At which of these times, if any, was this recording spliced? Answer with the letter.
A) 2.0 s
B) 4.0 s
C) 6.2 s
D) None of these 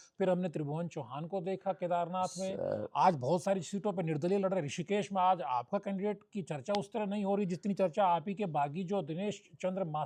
D